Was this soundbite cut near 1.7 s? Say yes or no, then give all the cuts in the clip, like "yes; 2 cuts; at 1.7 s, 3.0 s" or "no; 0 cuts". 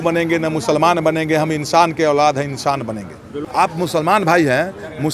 no; 1 cut; at 3.3 s